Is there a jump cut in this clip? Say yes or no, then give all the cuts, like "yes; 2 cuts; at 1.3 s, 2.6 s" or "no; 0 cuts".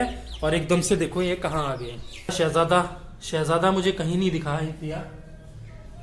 yes; 1 cut; at 2.3 s